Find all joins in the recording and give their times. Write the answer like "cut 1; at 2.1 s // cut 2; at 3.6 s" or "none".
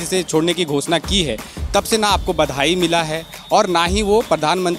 none